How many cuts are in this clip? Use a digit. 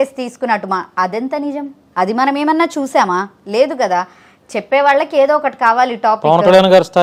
0